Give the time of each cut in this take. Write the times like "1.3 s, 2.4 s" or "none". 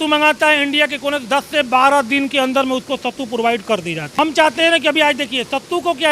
none